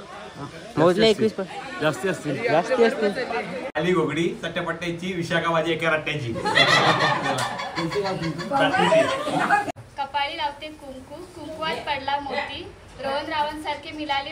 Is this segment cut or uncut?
cut